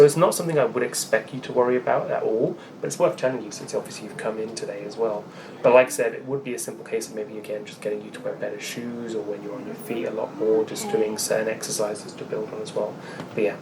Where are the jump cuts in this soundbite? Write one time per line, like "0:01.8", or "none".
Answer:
none